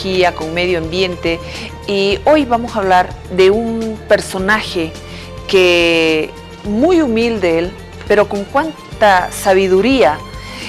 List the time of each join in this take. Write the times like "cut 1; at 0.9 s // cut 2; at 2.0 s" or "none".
cut 1; at 9.4 s